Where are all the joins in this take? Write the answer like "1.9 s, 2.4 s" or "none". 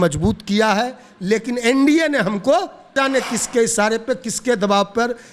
2.9 s